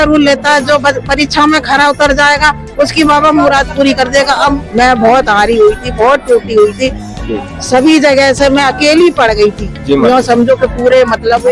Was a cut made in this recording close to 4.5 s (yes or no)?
yes